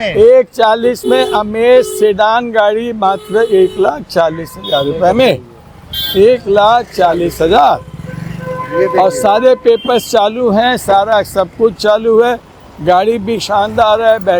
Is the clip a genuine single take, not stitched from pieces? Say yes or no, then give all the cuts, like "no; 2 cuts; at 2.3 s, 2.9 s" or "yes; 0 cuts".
yes; 0 cuts